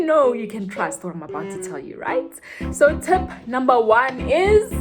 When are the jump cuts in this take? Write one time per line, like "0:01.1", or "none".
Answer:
0:02.6